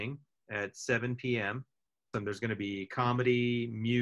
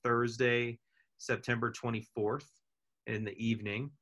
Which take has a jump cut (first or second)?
first